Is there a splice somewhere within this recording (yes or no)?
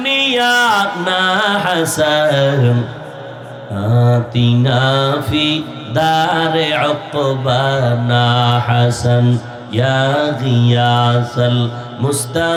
no